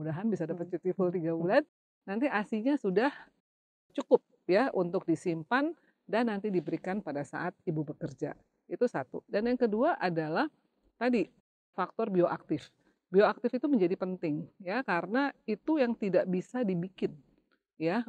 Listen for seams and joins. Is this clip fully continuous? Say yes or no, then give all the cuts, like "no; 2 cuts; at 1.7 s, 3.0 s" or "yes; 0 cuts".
yes; 0 cuts